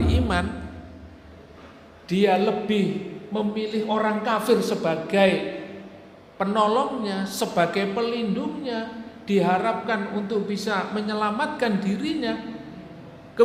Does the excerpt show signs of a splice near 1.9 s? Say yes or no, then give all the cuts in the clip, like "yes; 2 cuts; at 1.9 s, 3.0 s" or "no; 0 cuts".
no; 0 cuts